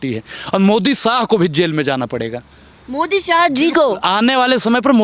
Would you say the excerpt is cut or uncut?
uncut